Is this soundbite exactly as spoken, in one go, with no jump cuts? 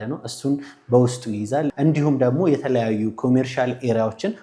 no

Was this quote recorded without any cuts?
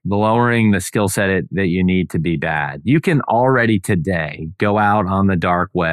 yes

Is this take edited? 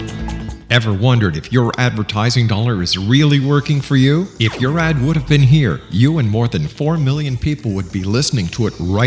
no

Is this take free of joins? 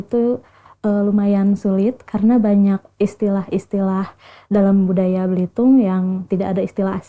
yes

